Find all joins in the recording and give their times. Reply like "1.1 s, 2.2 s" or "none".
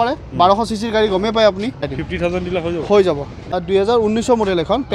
1.9 s, 3.6 s